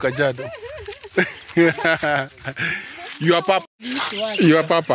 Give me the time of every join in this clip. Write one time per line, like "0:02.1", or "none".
none